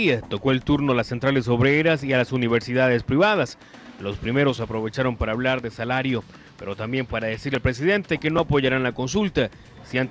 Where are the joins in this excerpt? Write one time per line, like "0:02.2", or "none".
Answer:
none